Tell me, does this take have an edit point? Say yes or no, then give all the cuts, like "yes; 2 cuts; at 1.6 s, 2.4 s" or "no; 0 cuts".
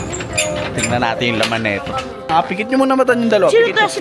yes; 1 cut; at 2.3 s